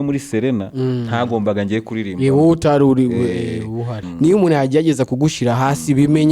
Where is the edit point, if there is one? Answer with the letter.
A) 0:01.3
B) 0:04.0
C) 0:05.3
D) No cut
B